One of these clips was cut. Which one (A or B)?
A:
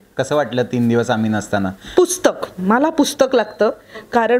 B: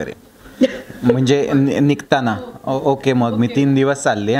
A